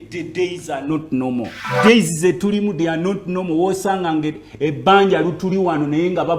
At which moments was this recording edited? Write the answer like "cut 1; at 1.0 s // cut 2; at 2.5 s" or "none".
cut 1; at 1.6 s